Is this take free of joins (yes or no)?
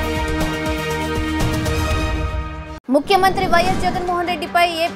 no